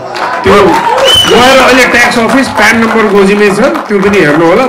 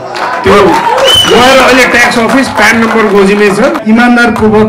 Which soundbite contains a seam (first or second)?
second